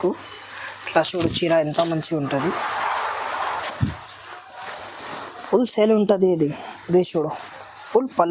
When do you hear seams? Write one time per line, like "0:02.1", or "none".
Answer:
none

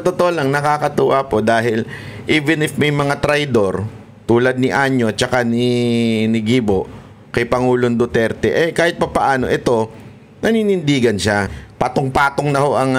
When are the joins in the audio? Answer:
0:11.6

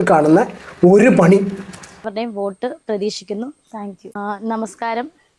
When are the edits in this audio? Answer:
0:02.1

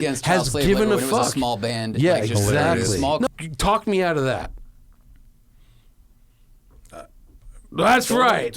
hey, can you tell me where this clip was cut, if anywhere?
0:03.3

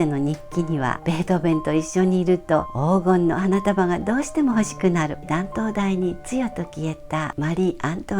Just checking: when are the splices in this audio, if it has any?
0:00.9
0:05.2
0:07.3

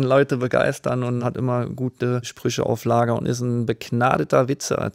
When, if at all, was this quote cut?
0:01.2
0:02.3

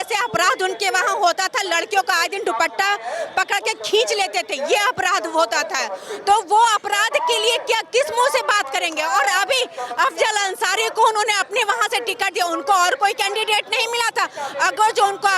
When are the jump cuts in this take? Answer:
none

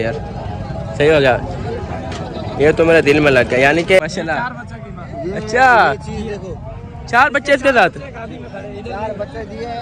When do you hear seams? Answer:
0:04.0

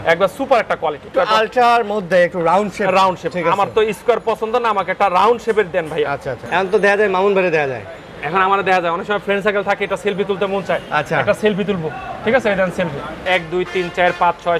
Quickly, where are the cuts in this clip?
0:01.1
0:06.3
0:13.2

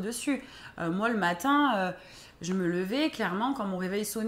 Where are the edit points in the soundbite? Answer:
none

